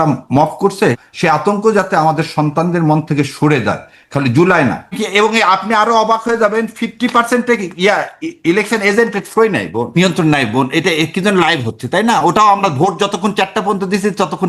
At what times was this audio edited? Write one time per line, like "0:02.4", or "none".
0:01.0
0:04.9
0:10.0